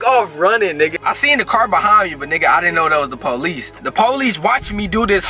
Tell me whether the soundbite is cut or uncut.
cut